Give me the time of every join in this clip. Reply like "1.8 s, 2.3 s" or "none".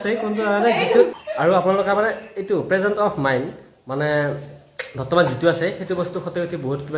1.2 s